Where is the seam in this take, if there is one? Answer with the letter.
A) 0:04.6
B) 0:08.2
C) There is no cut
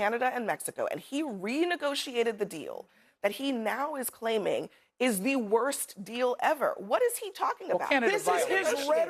C